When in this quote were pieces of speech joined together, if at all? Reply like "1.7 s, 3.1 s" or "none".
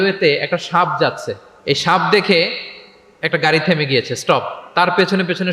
none